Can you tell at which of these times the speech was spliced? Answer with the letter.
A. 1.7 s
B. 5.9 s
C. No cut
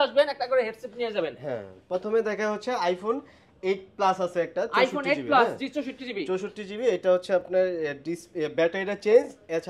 C